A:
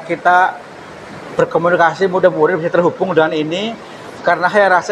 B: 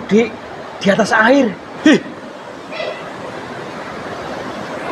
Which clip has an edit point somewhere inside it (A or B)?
B